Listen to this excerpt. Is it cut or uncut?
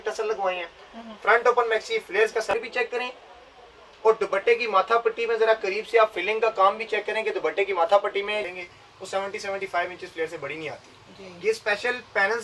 cut